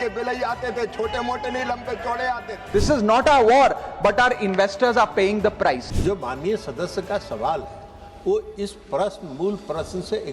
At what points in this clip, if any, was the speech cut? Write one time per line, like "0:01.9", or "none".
0:02.7
0:05.9